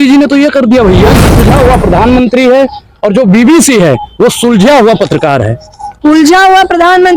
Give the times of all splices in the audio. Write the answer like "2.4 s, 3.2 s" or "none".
1.4 s